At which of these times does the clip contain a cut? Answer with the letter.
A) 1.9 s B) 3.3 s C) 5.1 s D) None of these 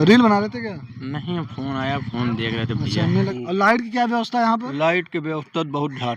B